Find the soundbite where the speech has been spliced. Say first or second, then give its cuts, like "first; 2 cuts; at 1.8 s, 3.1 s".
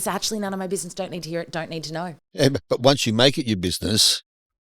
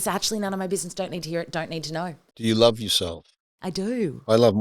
second; 1 cut; at 2.2 s